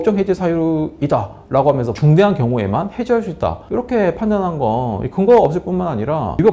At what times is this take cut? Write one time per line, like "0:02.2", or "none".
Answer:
0:01.9